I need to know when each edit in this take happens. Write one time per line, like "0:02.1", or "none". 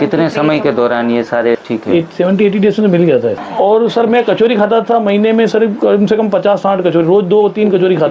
0:01.6
0:03.4